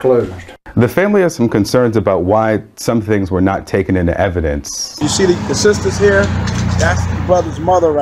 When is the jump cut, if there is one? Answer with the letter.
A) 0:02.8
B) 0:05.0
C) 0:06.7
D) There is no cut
B